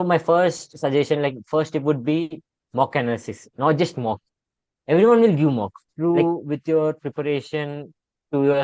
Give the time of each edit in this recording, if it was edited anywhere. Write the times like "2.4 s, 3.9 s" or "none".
5.9 s

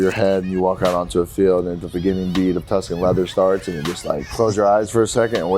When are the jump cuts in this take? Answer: 1.8 s, 4.3 s

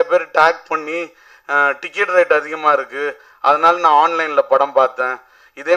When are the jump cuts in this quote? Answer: none

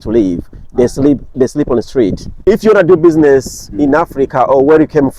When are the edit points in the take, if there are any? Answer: 2.3 s

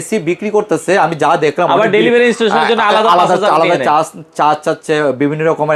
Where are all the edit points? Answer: none

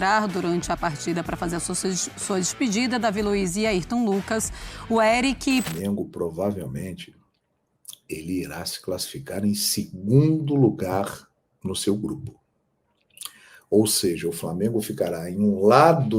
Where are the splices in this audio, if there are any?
5.7 s

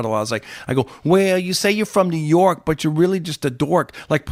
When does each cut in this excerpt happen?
none

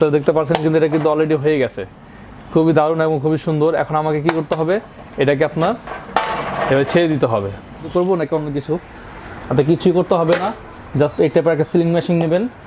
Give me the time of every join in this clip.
7.9 s

